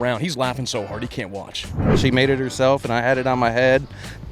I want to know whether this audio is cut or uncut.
cut